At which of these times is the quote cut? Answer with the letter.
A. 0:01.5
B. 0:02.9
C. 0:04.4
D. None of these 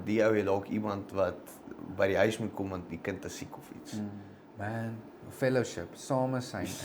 C